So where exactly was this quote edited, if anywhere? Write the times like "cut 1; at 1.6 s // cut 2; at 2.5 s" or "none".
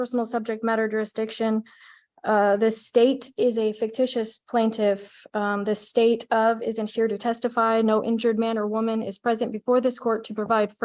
none

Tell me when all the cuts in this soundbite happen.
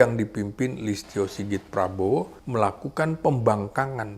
cut 1; at 2.4 s

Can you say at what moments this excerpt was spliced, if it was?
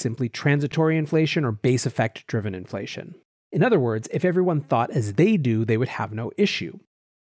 none

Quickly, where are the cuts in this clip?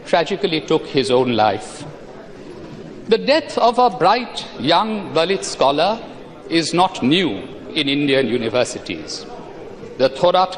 none

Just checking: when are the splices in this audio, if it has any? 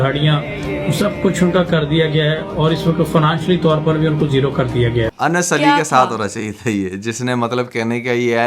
cut 1; at 5.1 s

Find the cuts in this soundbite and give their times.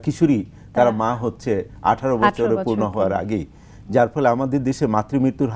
none

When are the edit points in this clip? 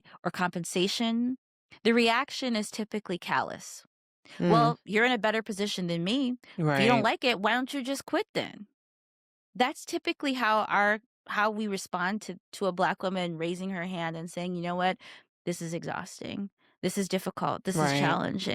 none

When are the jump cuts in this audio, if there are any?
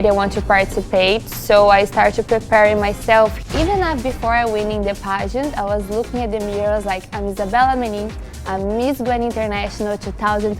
cut 1; at 3.4 s

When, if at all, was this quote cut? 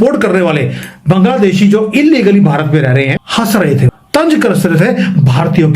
cut 1; at 3.2 s // cut 2; at 4.0 s

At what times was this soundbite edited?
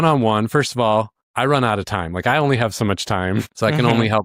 none

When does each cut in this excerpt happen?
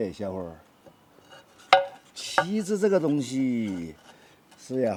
none

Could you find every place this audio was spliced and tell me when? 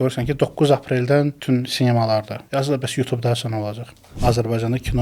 cut 1; at 1.4 s // cut 2; at 2.4 s // cut 3; at 4.2 s

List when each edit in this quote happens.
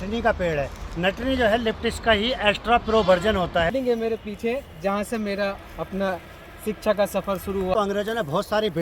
cut 1; at 3.7 s // cut 2; at 7.7 s

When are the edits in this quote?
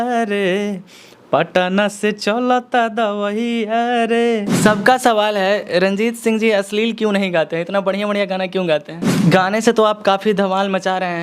cut 1; at 4.5 s // cut 2; at 9.0 s

